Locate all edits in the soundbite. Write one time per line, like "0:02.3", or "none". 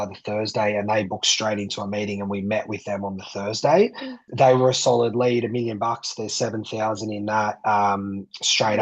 0:04.2